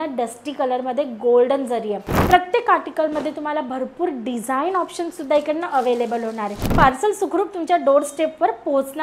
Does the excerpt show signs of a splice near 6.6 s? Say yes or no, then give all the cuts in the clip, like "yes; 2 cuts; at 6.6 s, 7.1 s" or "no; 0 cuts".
yes; 2 cuts; at 2.1 s, 6.6 s